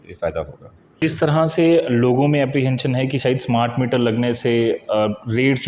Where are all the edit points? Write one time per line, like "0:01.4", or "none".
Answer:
0:01.0

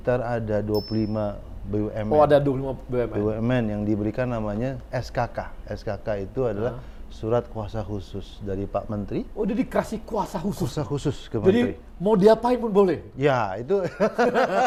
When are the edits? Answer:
none

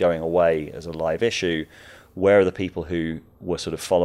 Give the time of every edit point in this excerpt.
none

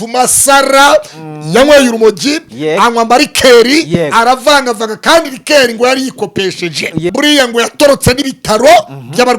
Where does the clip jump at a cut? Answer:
0:07.1

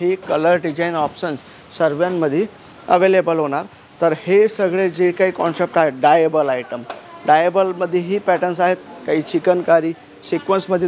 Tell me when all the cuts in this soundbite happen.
none

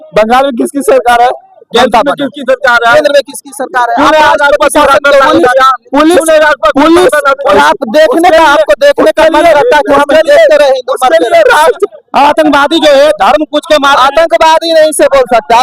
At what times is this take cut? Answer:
0:07.5
0:11.8

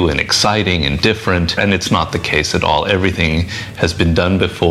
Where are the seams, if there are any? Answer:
0:01.6

